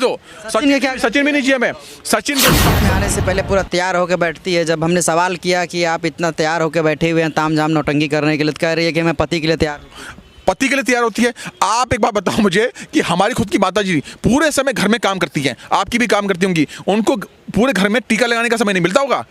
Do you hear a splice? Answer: yes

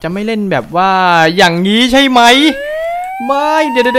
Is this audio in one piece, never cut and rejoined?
yes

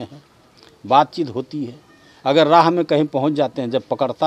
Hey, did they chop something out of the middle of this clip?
no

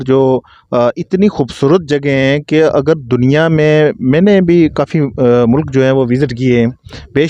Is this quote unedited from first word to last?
yes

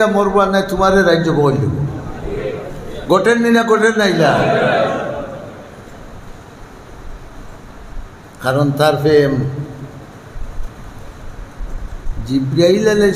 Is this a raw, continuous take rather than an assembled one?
yes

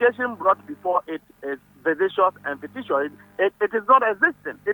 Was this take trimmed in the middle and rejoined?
no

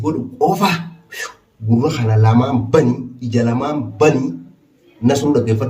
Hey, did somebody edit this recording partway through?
no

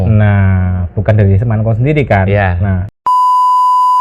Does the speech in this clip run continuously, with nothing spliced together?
no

